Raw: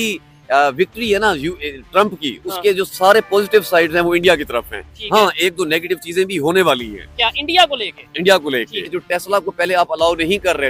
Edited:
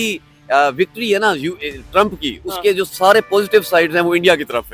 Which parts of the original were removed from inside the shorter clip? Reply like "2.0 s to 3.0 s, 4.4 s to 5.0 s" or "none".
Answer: none